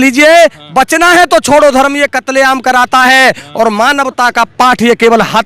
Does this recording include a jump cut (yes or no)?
no